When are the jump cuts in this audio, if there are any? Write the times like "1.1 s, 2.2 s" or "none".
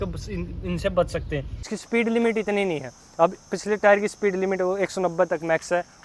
1.7 s